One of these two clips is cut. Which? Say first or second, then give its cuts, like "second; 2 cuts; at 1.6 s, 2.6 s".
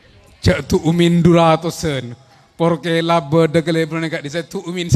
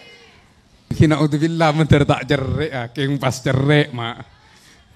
second; 1 cut; at 0.9 s